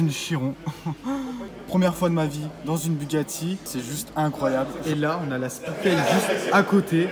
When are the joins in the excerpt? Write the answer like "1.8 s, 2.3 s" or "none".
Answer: 1.5 s, 3.7 s, 4.8 s

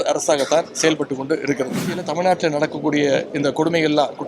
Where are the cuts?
2.0 s

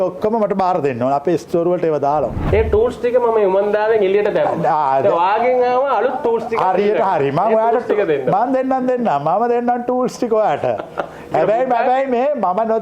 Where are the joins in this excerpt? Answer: 1.4 s, 2.4 s

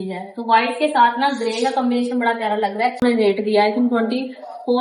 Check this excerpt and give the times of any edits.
3.0 s

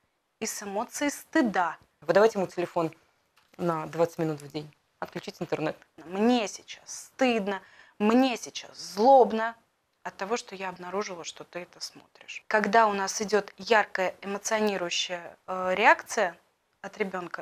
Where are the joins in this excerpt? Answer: 1.9 s, 6.0 s, 12.3 s

